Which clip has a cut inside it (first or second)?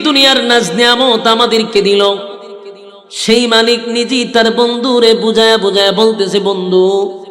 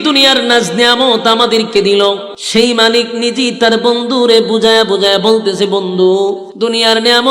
second